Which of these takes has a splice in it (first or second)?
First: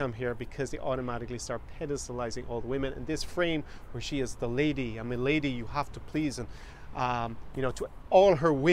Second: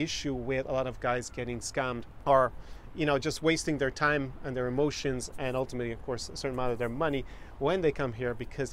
second